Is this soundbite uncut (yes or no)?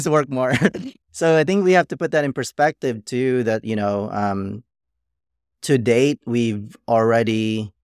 yes